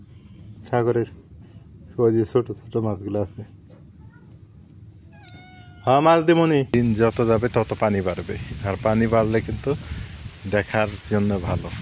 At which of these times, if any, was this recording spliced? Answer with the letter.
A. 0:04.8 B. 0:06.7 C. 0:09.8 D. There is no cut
B